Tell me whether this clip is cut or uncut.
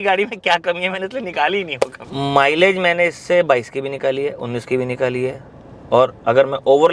cut